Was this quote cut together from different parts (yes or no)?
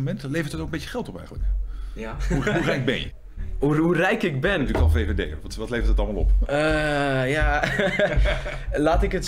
no